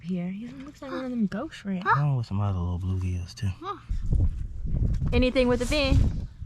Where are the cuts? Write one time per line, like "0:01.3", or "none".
0:03.9